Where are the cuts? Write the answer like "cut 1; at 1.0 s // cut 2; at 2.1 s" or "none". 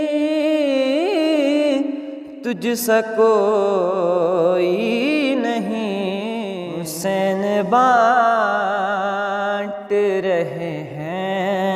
cut 1; at 6.8 s